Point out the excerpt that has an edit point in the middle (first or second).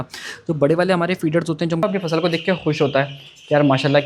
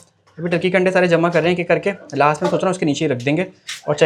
first